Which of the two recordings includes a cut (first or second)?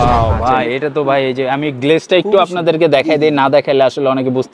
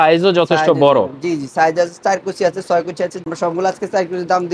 second